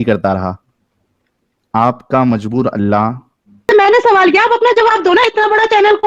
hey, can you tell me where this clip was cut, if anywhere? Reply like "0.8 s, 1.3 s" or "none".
3.6 s